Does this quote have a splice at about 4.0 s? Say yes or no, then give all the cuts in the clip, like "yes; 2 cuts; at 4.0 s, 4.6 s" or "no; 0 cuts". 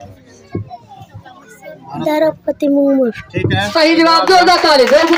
no; 0 cuts